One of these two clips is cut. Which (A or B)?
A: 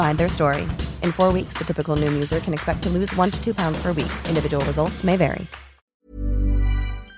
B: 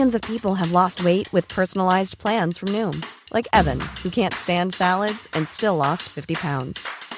A